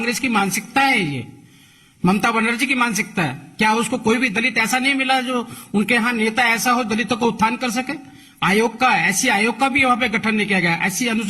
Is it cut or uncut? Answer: uncut